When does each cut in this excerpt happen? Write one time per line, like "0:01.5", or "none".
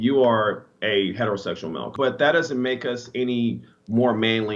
0:01.9